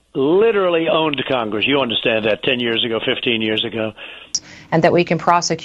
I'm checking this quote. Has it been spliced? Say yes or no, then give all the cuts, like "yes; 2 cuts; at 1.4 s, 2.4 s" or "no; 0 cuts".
yes; 1 cut; at 4.4 s